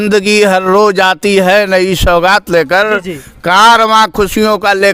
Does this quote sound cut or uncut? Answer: uncut